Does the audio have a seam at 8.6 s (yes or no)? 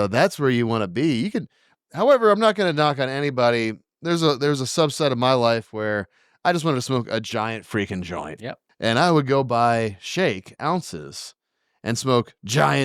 yes